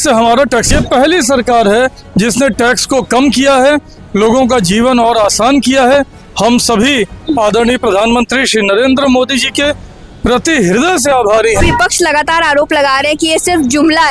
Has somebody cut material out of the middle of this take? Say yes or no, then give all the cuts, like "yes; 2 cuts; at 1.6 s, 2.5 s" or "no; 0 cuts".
yes; 2 cuts; at 0.7 s, 11.6 s